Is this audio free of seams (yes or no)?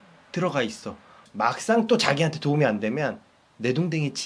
no